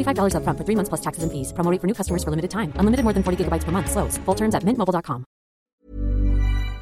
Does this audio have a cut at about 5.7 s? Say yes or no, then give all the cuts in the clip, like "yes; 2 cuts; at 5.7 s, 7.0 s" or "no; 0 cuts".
yes; 1 cut; at 5.7 s